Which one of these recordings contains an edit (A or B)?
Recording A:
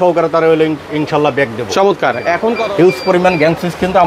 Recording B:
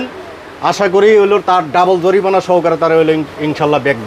A